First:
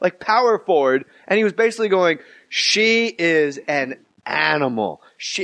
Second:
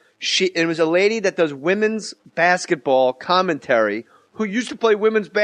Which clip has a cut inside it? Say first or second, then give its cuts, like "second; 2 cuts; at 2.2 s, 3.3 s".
second; 1 cut; at 2.5 s